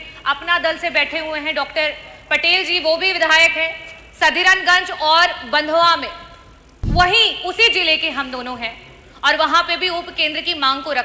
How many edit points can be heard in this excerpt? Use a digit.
0